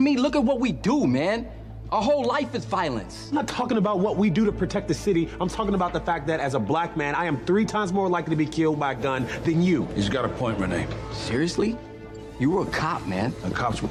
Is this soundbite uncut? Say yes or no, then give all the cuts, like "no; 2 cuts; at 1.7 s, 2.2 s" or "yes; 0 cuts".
yes; 0 cuts